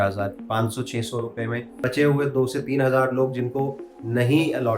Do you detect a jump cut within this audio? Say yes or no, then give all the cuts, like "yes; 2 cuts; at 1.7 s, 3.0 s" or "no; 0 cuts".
yes; 1 cut; at 1.7 s